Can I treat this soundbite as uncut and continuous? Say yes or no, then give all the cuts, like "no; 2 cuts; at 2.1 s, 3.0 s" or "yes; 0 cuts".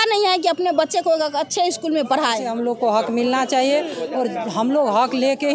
no; 1 cut; at 2.5 s